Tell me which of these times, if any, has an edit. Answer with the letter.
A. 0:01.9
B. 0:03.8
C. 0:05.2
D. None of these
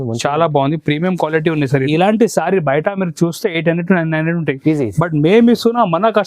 A